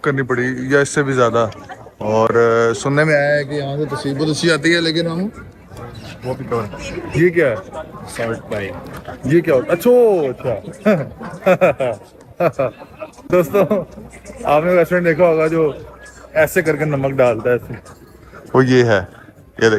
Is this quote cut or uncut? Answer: uncut